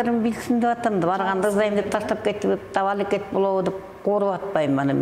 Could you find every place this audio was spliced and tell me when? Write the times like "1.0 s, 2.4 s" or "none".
none

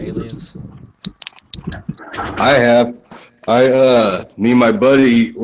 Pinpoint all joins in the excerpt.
1.6 s

